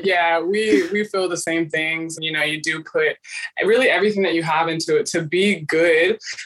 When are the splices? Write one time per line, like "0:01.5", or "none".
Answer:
0:02.1
0:03.4